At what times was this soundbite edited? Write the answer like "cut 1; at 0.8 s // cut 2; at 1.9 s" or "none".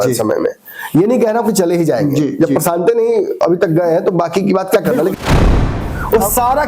cut 1; at 5.5 s